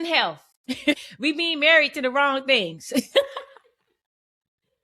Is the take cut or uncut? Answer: cut